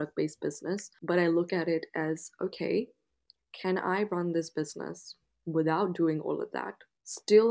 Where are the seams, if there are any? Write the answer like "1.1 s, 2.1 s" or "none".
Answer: 0.9 s